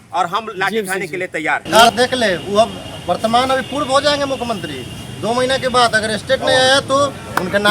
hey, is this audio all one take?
no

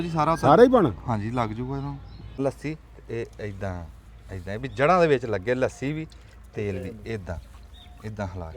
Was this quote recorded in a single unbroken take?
no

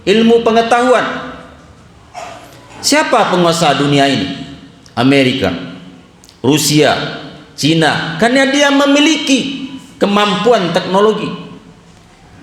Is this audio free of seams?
no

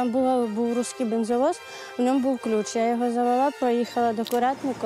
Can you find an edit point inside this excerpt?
no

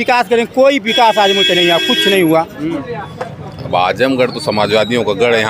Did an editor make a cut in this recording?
yes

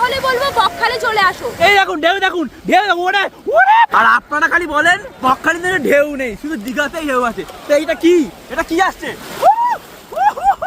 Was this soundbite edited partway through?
yes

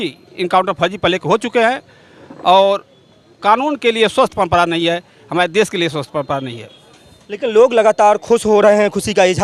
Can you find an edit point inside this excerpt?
no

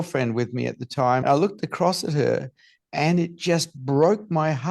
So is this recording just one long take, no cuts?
no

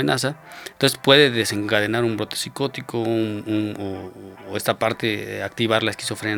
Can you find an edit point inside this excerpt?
no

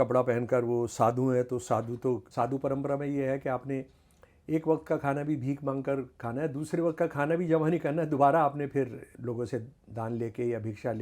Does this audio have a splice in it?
yes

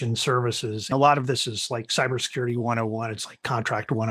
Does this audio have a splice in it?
yes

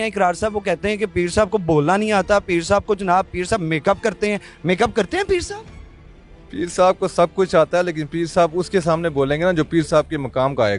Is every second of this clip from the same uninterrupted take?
yes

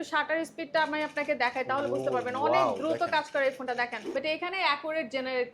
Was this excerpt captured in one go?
no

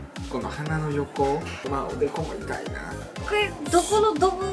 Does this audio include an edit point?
yes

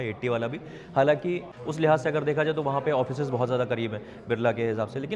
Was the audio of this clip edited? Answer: yes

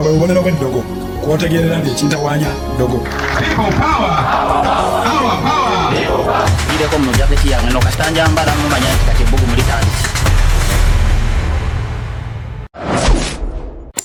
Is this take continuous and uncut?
yes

